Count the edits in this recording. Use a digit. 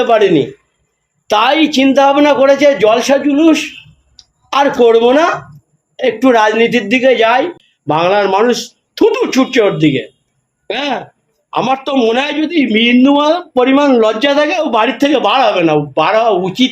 1